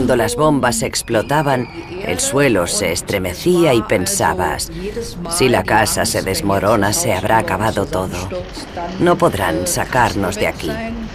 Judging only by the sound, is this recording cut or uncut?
cut